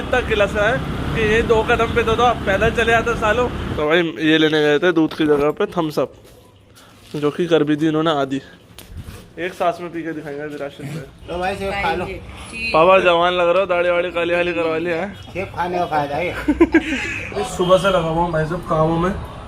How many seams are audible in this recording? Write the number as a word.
three